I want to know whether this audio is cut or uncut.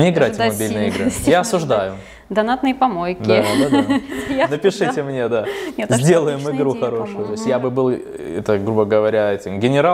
cut